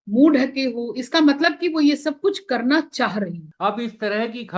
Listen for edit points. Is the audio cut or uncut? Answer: cut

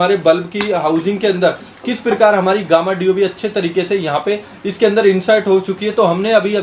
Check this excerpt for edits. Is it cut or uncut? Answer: uncut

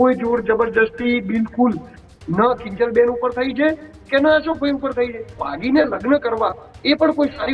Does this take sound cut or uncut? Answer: cut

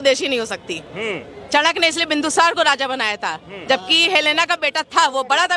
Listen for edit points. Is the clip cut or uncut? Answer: uncut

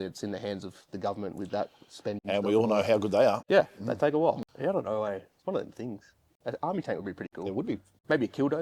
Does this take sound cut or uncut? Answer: cut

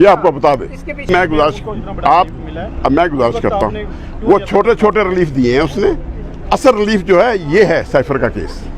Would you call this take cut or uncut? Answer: cut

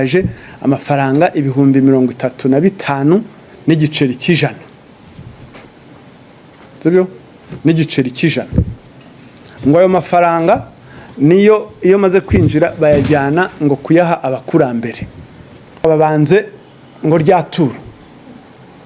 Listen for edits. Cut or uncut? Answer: cut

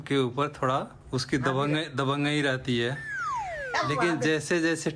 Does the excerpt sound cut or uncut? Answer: uncut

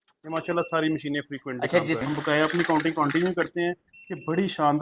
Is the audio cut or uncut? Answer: cut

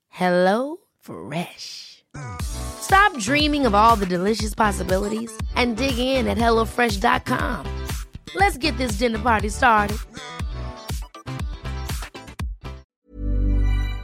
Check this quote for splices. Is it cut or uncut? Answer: cut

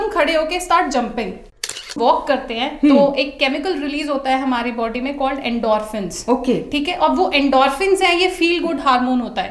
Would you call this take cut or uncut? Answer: cut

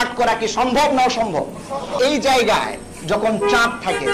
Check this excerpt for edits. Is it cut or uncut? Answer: cut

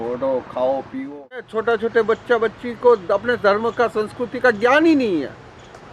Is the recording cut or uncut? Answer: cut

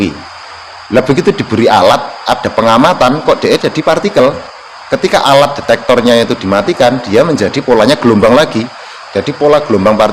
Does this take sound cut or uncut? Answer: uncut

